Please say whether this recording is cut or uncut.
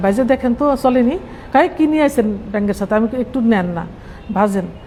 uncut